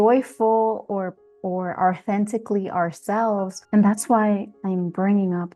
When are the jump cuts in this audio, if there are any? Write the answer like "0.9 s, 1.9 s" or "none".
3.6 s